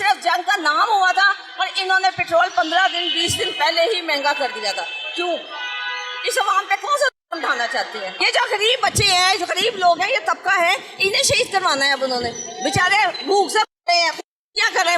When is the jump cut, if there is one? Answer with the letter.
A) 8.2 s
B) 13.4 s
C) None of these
A